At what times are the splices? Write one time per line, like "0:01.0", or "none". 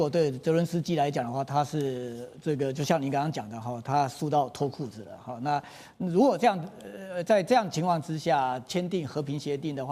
none